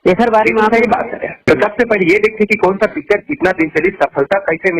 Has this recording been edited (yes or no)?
yes